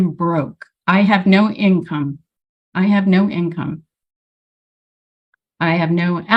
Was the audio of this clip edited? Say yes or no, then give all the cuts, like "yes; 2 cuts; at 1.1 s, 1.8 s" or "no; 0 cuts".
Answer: no; 0 cuts